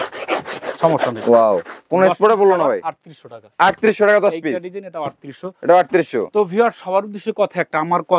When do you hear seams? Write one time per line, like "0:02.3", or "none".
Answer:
none